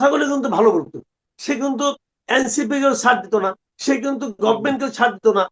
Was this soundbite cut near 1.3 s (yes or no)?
yes